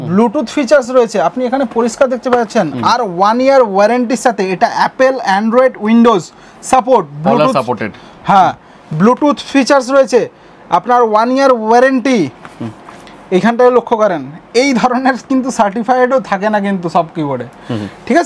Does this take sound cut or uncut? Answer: uncut